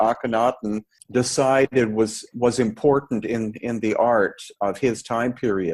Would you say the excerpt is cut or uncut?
cut